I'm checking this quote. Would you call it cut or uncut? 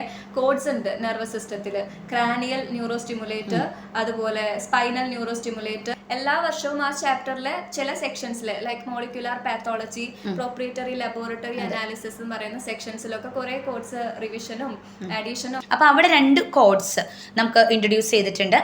cut